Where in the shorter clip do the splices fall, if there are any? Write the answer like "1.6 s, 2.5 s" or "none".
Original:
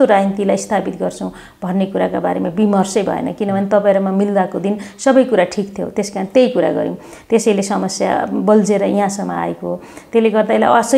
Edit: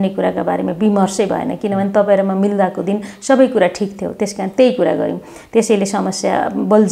none

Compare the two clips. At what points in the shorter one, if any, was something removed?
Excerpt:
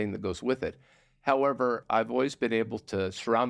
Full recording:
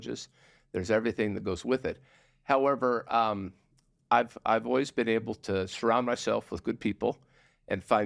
1.8 s

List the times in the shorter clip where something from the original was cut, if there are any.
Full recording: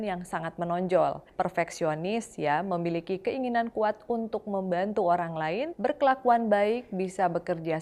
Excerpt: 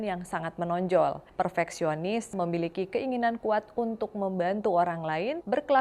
2.3 s

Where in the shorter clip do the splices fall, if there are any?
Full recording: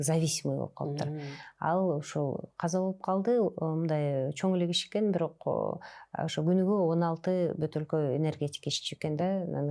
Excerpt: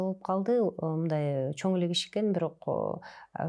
none

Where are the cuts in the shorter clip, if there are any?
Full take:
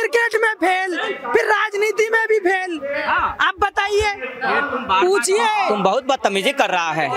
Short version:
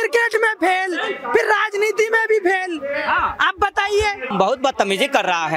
4.3 s

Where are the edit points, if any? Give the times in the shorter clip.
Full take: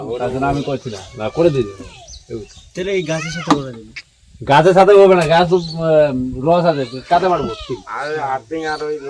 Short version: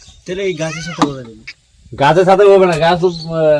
none

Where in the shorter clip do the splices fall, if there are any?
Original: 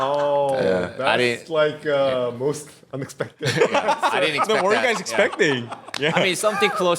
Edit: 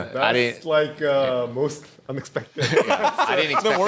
none

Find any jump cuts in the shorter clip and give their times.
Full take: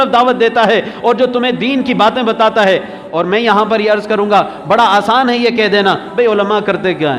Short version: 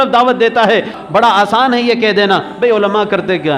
1.0 s

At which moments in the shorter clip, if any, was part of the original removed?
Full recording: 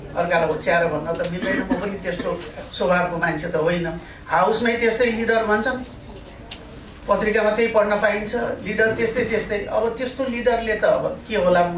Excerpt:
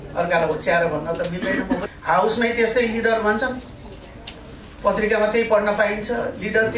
1.9 s

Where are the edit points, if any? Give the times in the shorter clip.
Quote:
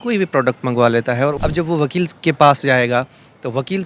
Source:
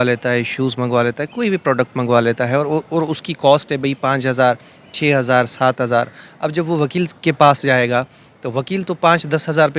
1.4 s

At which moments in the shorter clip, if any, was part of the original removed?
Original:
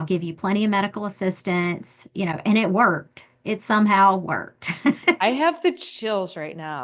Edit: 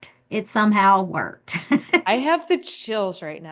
none

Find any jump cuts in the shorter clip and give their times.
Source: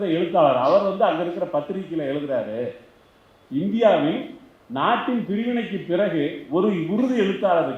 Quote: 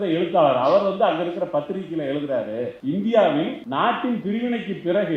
2.8 s, 3.6 s

